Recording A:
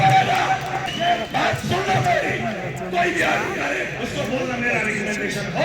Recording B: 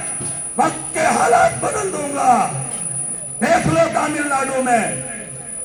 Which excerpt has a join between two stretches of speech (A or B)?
A